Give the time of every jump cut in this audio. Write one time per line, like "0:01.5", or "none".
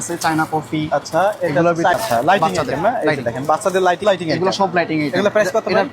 0:02.0
0:04.0